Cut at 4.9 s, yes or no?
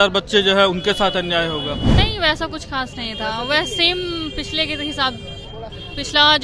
no